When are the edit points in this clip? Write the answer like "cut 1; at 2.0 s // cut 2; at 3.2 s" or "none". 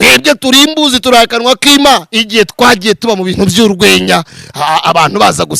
cut 1; at 2.2 s